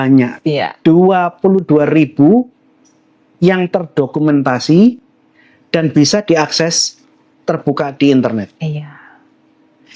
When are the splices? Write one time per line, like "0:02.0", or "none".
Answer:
none